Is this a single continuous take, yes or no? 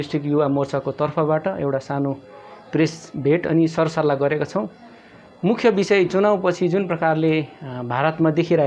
yes